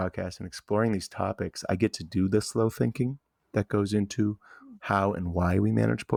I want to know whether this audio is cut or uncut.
uncut